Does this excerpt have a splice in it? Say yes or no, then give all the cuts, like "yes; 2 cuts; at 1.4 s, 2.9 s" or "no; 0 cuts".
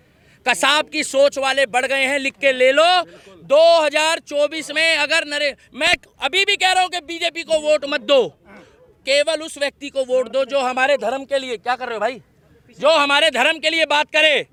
no; 0 cuts